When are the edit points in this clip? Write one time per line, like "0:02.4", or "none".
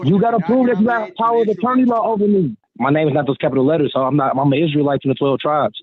0:02.6